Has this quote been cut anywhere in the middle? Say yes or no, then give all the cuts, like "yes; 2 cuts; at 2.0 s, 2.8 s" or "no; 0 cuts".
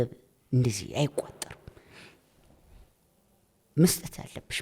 no; 0 cuts